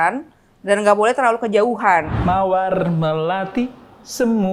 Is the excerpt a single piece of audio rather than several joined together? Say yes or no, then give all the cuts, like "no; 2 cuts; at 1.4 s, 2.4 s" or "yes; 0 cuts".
no; 1 cut; at 2.1 s